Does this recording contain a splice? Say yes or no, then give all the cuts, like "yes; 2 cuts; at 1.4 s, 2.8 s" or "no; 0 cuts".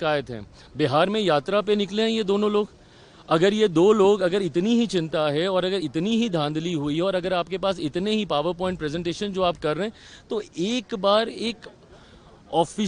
no; 0 cuts